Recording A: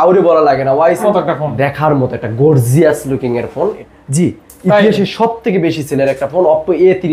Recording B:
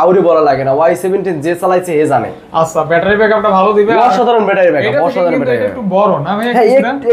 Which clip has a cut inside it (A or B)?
A